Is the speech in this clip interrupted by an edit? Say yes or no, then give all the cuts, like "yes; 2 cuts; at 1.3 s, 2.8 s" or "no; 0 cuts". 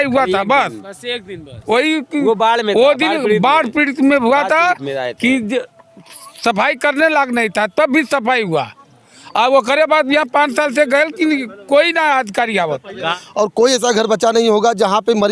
yes; 1 cut; at 13.2 s